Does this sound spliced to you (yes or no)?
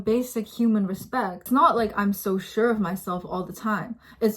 yes